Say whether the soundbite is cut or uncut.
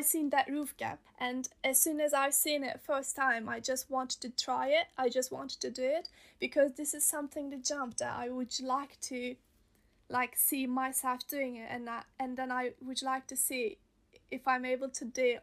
cut